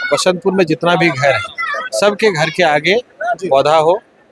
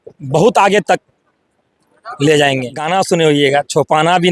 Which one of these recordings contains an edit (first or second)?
second